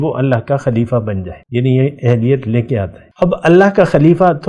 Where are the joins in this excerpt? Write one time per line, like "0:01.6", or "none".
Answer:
0:01.3
0:03.0